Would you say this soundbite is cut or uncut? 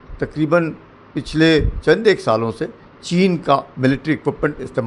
cut